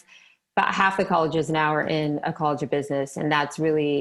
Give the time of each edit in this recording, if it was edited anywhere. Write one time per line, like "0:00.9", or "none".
none